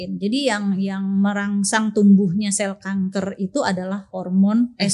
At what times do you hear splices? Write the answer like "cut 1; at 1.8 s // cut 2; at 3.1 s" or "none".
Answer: none